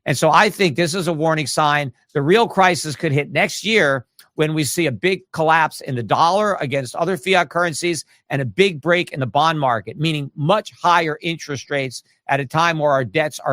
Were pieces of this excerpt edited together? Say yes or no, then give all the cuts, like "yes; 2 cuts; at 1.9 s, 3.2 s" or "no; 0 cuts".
no; 0 cuts